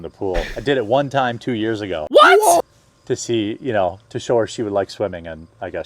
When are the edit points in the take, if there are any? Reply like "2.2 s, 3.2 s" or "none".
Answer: 2.7 s